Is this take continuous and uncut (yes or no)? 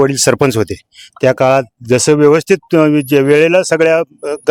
yes